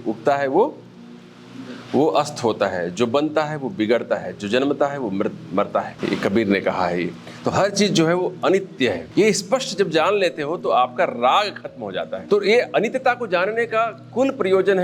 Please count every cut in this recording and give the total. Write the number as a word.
three